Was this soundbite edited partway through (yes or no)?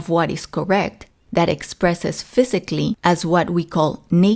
no